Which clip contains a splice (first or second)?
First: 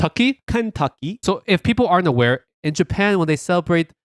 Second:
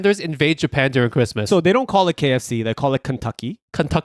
first